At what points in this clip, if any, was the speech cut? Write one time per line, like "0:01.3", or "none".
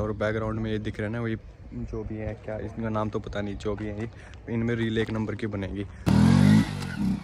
0:05.9